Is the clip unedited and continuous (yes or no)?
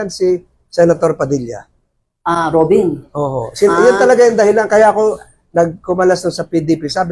yes